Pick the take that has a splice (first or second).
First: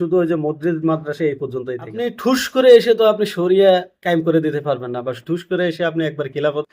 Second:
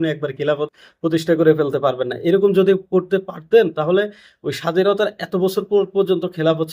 first